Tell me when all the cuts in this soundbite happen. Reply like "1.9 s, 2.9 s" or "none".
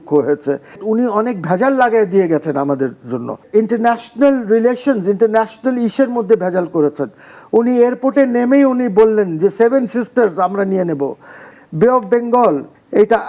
0.8 s, 3.4 s, 11.5 s